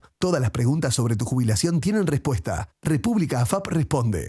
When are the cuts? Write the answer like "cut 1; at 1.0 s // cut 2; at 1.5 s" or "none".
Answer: none